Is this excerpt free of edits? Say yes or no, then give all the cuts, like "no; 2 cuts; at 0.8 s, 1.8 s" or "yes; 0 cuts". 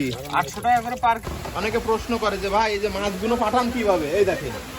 no; 1 cut; at 1.3 s